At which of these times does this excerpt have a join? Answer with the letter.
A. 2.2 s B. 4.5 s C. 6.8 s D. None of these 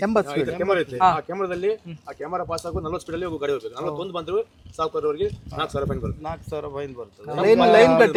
D